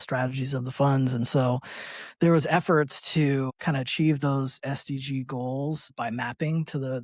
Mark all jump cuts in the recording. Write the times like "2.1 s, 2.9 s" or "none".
3.5 s, 5.9 s